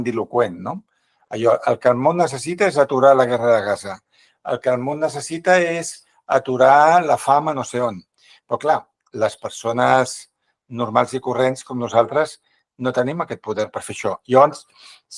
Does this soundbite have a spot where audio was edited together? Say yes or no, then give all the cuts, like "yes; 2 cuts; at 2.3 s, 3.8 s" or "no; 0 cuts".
no; 0 cuts